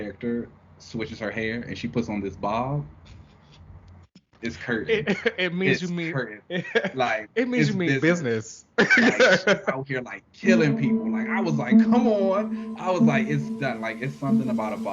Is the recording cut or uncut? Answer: uncut